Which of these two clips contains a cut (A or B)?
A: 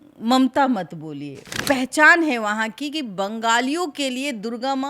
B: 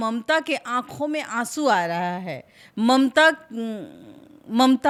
A